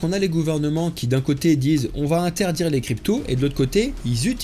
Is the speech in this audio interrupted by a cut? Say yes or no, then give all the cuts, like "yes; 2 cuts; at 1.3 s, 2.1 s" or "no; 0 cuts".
no; 0 cuts